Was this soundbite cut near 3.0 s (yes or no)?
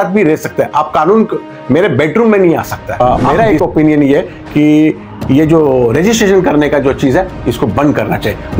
yes